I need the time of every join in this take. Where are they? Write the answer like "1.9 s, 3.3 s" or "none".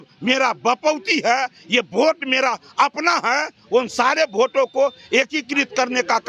none